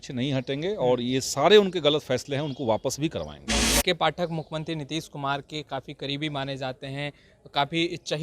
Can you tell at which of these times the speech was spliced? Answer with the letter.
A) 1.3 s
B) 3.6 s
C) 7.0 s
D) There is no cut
B